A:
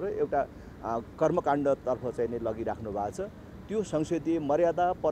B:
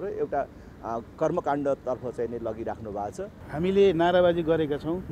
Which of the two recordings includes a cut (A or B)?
B